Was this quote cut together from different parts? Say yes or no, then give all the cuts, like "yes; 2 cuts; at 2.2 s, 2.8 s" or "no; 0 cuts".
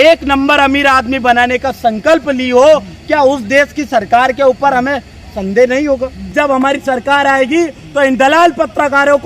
yes; 1 cut; at 6.2 s